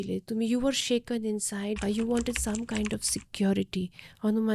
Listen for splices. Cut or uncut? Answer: cut